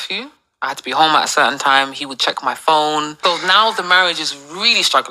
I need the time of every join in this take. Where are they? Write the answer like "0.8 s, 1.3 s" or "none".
3.2 s